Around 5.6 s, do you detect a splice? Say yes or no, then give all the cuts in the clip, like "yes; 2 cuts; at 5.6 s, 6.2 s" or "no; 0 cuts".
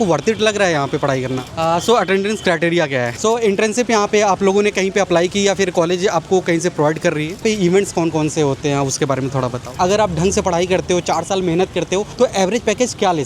no; 5 cuts; at 1.5 s, 3.1 s, 7.4 s, 9.8 s, 12.1 s